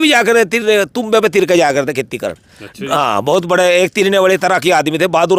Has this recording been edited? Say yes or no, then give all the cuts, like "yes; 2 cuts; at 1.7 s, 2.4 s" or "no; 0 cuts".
no; 0 cuts